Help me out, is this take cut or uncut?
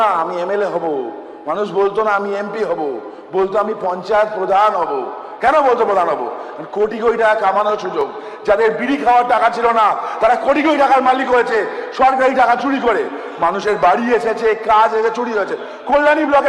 uncut